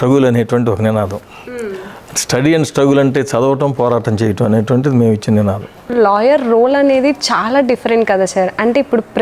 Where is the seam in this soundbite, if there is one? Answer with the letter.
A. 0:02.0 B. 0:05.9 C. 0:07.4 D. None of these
B